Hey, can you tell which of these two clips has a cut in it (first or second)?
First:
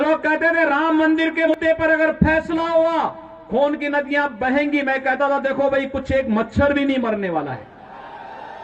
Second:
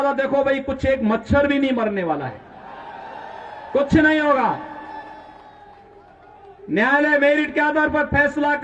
first